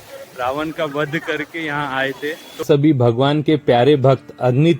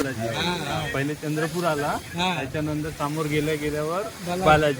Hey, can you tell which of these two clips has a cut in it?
first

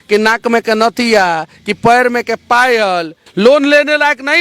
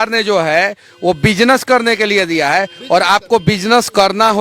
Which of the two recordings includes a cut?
first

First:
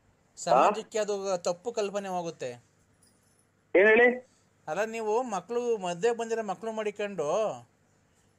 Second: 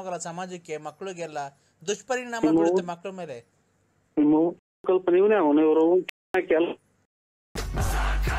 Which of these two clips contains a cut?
second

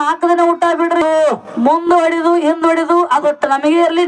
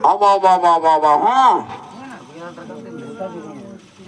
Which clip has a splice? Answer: first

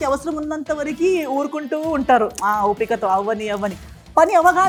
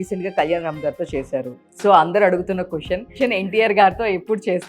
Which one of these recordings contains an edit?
second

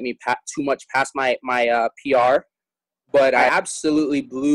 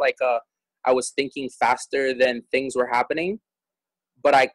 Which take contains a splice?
first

